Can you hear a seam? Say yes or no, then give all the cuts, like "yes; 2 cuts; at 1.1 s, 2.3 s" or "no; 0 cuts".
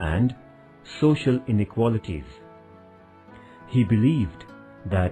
yes; 2 cuts; at 2.3 s, 3.7 s